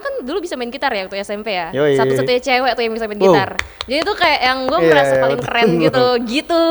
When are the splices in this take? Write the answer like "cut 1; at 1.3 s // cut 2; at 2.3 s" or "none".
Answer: none